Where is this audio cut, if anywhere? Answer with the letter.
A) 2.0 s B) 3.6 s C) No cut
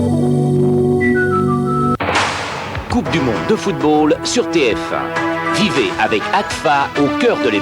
A